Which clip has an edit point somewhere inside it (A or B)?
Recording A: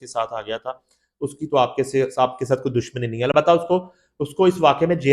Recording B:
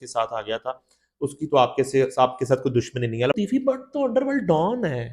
B